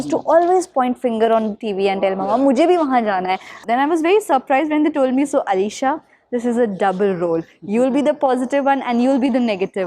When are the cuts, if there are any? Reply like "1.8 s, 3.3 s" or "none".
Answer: 3.5 s